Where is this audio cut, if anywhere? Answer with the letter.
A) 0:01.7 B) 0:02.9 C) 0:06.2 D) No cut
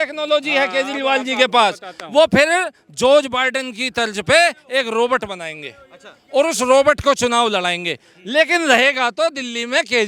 D